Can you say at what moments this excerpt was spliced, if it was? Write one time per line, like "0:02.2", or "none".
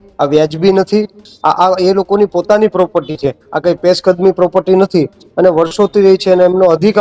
0:01.2